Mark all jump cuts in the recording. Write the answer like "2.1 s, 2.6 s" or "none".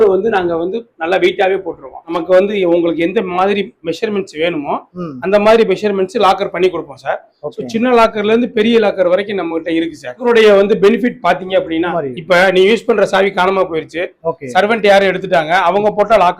2.2 s, 10.2 s, 11.9 s